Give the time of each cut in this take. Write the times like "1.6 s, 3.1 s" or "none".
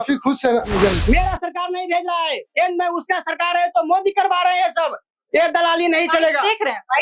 1.0 s